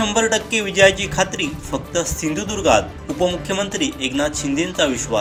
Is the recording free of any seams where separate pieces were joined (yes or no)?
yes